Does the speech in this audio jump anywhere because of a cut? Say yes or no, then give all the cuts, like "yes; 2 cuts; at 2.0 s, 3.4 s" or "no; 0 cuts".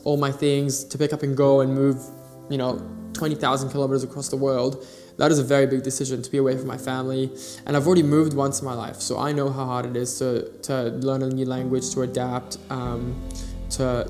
no; 0 cuts